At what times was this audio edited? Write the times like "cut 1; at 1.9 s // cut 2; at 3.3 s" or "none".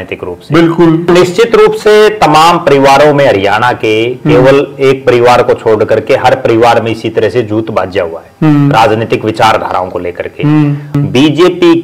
cut 1; at 1.1 s // cut 2; at 11.0 s